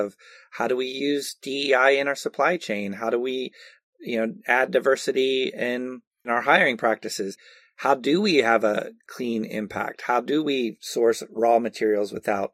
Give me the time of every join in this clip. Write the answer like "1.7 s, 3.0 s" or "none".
6.3 s, 9.0 s